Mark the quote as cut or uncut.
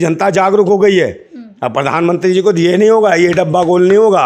uncut